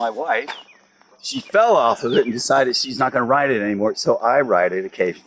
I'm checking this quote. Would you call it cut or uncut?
uncut